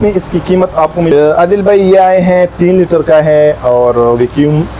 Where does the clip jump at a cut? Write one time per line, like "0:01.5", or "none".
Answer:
0:01.1